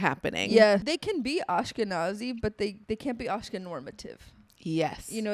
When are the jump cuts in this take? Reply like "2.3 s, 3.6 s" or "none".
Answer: 1.2 s